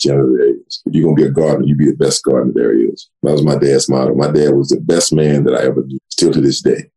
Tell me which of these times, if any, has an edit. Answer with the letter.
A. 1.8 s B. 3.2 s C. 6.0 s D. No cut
C